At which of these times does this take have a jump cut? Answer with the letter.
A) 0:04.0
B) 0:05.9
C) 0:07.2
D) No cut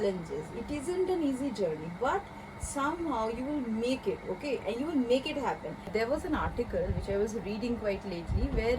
B